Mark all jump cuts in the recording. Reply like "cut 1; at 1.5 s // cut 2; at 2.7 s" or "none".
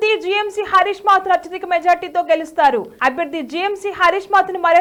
none